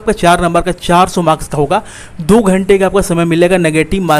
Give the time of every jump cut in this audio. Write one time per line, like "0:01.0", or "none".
none